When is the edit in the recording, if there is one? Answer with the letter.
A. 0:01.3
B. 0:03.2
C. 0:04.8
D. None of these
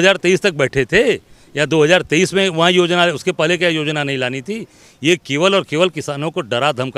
D